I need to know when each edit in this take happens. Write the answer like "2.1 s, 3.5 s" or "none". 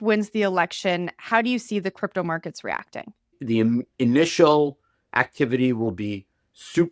3.4 s

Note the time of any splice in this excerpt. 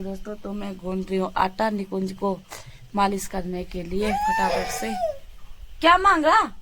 none

